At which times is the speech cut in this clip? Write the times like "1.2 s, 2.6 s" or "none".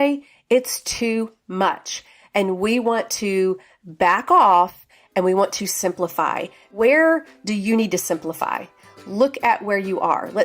6.7 s